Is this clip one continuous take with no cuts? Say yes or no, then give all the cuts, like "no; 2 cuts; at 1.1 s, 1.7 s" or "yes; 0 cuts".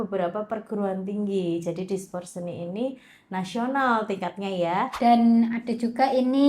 no; 1 cut; at 4.9 s